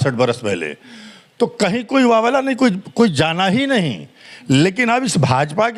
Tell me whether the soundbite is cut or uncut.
uncut